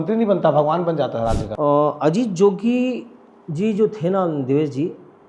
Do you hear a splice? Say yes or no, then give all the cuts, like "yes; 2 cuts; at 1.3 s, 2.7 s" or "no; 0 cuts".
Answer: yes; 1 cut; at 1.5 s